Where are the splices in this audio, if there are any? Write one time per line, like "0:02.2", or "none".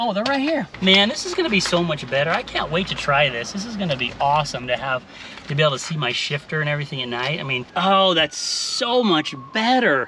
0:07.6